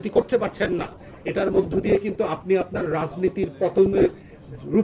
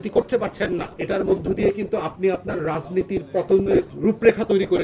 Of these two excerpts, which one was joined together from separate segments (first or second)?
second